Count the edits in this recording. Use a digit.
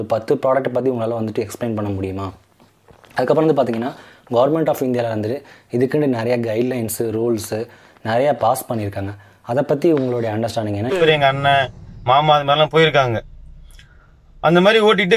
1